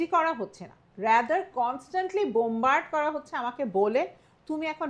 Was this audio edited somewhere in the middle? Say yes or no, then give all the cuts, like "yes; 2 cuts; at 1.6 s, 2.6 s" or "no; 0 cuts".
no; 0 cuts